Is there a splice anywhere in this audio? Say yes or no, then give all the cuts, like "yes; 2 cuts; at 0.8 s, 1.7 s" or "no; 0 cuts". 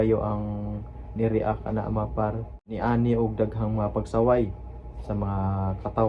yes; 1 cut; at 2.6 s